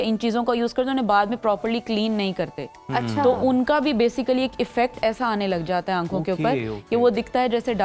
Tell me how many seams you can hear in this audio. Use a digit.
0